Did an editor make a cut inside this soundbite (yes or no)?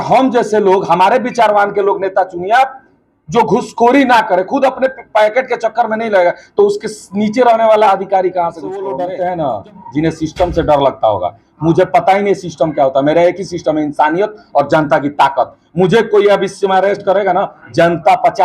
yes